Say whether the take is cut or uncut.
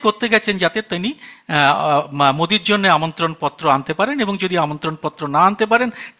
uncut